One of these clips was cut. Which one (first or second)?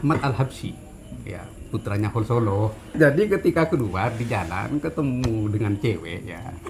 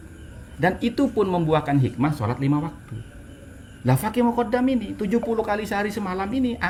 first